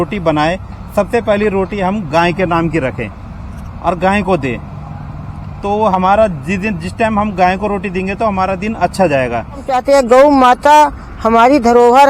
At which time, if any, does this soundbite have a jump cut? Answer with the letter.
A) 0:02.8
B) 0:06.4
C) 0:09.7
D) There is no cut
C